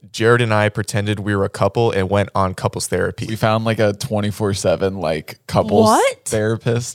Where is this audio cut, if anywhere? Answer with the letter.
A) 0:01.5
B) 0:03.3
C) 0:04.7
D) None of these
B